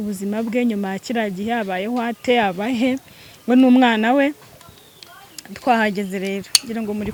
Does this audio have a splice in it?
no; 0 cuts

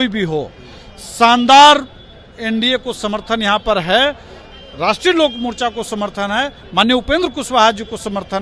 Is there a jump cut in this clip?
no; 0 cuts

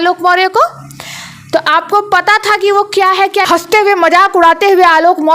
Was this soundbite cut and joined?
yes; 1 cut; at 3.5 s

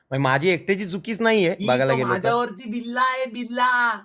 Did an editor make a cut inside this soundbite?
no; 0 cuts

